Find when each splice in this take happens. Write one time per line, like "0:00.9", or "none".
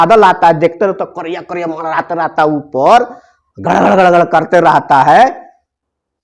none